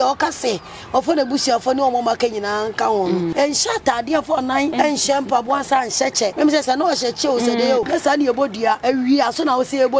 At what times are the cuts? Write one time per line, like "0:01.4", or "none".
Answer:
0:03.3
0:04.7
0:06.3
0:07.9
0:08.8